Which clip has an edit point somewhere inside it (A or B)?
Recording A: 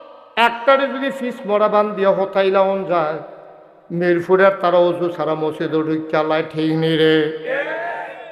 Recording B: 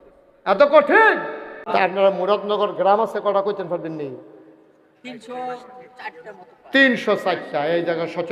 B